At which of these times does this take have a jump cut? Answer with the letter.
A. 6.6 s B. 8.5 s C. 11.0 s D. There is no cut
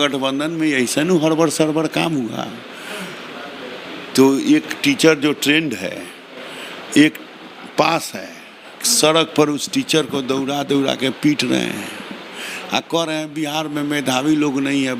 D